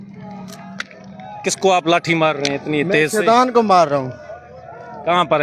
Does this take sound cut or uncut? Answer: uncut